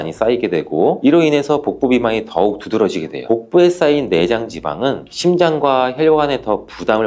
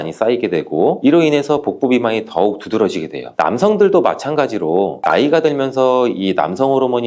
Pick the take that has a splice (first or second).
first